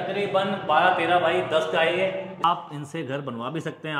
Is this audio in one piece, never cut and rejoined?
no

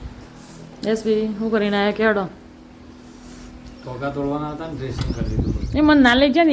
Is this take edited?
no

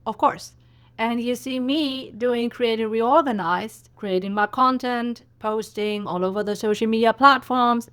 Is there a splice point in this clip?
no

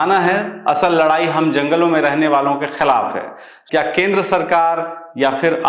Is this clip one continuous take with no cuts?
no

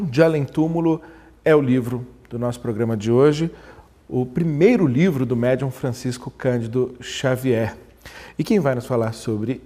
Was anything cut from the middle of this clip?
no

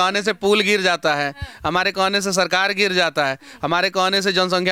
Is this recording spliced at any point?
no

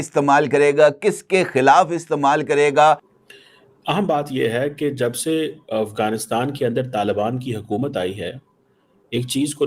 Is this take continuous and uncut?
no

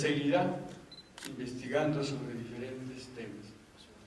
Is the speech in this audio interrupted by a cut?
yes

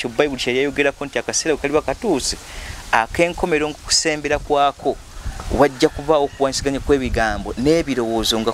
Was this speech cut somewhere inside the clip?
no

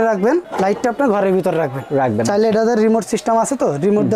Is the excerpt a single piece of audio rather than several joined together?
yes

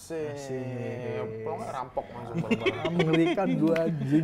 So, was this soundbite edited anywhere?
no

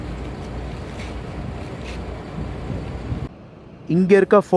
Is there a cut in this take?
yes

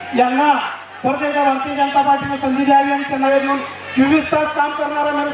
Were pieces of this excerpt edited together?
yes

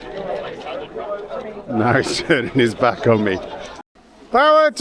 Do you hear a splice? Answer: yes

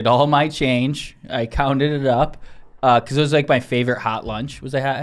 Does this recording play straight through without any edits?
yes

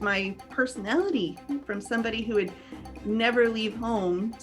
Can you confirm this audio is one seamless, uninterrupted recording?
no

